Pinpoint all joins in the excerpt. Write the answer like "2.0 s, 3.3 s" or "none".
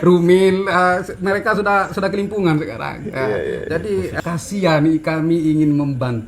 4.1 s